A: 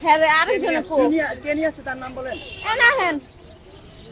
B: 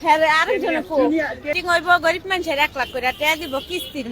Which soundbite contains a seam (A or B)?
B